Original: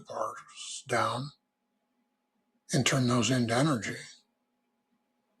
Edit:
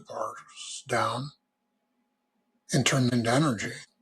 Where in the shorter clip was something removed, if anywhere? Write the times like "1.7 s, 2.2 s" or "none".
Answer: 3.1 s